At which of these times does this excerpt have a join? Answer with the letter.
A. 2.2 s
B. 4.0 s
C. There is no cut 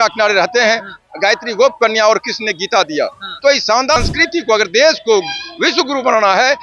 B